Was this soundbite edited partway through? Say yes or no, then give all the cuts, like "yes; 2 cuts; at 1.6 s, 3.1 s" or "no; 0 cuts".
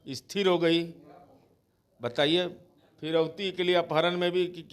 no; 0 cuts